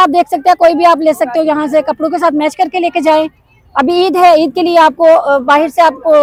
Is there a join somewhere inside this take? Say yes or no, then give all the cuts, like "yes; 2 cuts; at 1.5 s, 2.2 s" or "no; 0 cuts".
no; 0 cuts